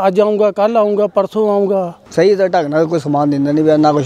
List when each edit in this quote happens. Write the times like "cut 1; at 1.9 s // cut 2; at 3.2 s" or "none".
cut 1; at 2.0 s

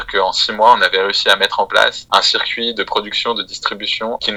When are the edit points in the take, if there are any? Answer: none

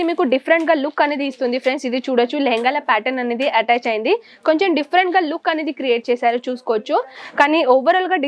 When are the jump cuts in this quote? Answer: cut 1; at 7.2 s

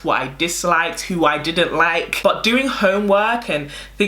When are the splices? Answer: cut 1; at 2.1 s

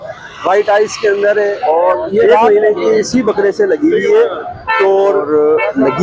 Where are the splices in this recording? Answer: cut 1; at 2.2 s // cut 2; at 5.2 s

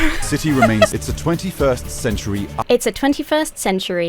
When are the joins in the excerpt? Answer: cut 1; at 0.9 s // cut 2; at 2.5 s

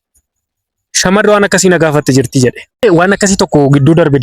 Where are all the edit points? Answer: cut 1; at 2.8 s

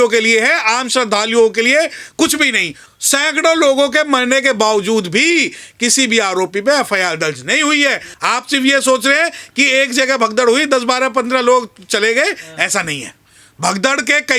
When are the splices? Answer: cut 1; at 2.8 s // cut 2; at 8.1 s

